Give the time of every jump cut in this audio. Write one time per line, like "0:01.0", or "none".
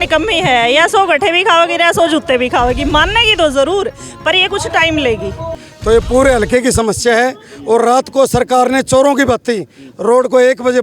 0:05.6